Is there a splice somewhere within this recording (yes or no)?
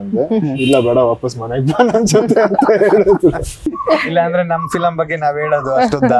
yes